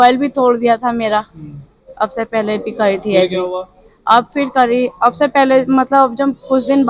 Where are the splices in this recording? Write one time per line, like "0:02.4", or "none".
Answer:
none